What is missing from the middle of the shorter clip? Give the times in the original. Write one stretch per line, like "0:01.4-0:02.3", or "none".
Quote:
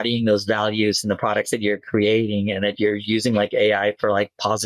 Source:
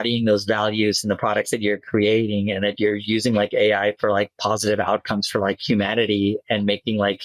none